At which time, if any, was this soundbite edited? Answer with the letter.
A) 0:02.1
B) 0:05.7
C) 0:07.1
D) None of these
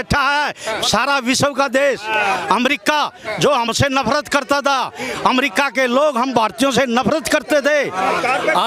D